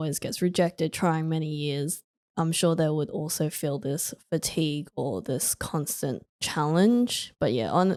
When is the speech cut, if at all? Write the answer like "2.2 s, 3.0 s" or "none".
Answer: none